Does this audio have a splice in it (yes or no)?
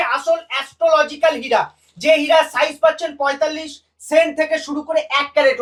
no